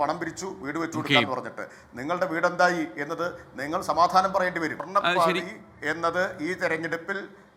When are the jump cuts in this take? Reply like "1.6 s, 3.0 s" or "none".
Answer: 4.8 s

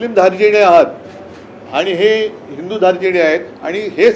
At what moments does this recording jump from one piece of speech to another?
none

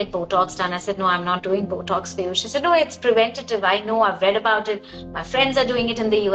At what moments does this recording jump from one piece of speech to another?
none

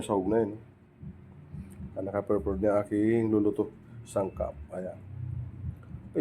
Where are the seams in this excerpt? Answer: none

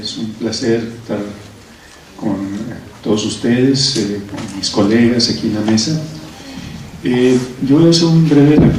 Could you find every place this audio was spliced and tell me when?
none

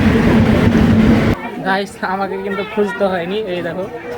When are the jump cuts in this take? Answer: 1.3 s

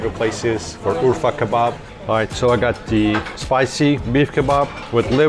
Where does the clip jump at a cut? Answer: 1.9 s, 4.0 s

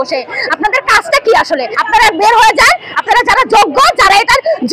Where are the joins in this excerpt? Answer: 1.7 s

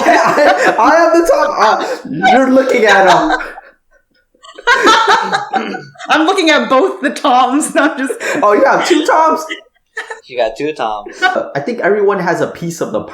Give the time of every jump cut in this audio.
11.4 s

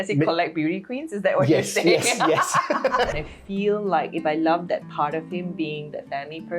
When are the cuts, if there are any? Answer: 3.1 s

